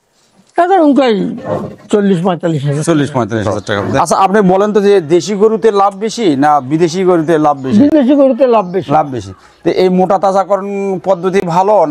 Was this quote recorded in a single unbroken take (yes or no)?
no